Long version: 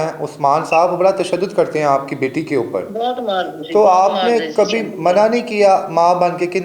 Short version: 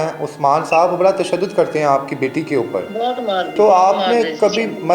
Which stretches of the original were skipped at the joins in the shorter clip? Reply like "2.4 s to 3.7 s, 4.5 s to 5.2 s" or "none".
3.5 s to 3.7 s